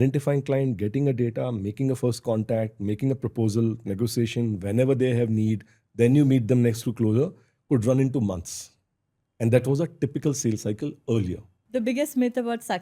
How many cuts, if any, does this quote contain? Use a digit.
1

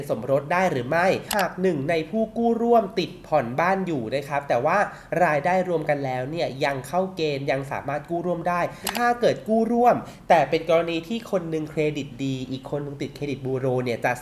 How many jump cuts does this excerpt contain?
2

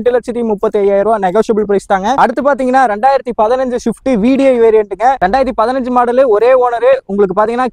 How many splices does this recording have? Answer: 0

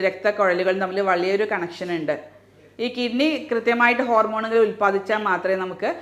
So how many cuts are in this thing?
0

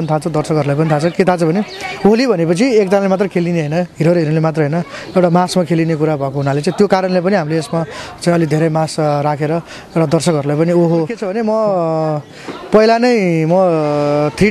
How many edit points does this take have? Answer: 1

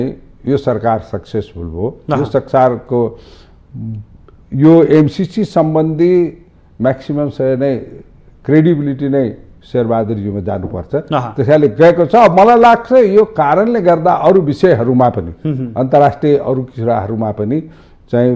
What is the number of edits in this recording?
0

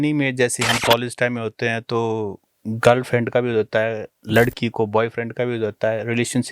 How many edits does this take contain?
0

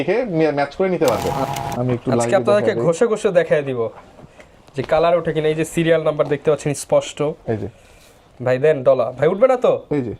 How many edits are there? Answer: 1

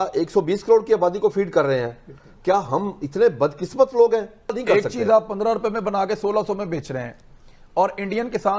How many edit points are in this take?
1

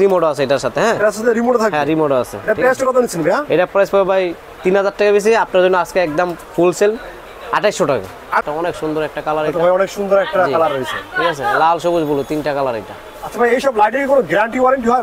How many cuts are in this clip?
1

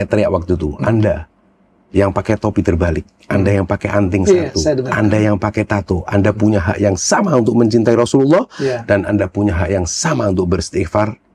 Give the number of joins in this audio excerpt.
0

